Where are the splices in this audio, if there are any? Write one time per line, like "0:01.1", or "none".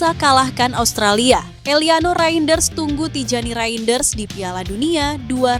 0:01.5